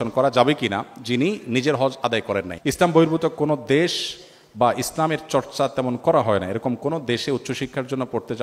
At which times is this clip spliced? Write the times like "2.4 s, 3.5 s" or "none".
2.5 s